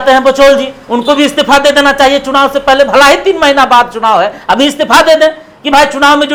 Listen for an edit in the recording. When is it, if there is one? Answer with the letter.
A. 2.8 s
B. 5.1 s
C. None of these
C